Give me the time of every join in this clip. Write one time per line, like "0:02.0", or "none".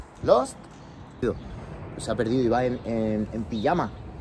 0:01.2